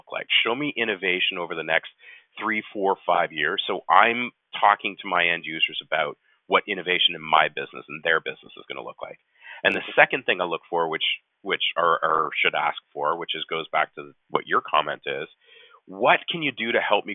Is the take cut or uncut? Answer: uncut